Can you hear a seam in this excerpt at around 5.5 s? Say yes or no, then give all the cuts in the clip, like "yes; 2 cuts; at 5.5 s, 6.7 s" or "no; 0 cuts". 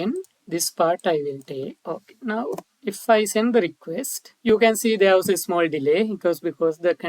no; 2 cuts; at 1.8 s, 4.2 s